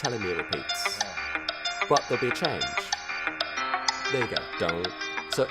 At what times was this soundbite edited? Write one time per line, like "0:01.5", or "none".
0:03.4